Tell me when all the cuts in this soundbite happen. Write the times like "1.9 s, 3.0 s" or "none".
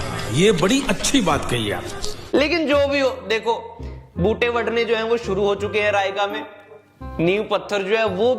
none